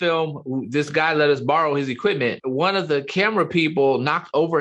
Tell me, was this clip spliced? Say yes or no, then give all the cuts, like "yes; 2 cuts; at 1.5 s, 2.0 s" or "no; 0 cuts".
yes; 1 cut; at 2.3 s